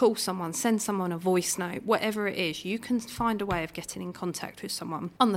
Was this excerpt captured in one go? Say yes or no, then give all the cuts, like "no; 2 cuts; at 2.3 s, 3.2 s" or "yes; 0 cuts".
yes; 0 cuts